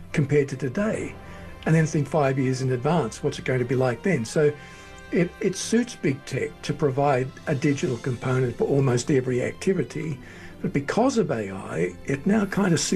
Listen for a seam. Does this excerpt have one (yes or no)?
no